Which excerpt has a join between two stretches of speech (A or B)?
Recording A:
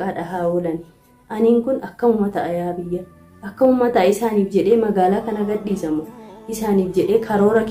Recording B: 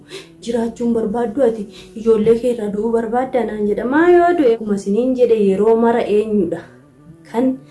B